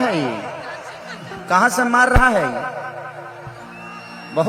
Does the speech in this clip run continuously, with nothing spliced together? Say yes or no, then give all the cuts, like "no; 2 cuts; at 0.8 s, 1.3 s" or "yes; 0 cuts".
yes; 0 cuts